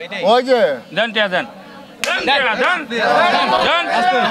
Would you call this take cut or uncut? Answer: uncut